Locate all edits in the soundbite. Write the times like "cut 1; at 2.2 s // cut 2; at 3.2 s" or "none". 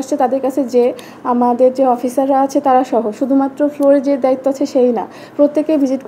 none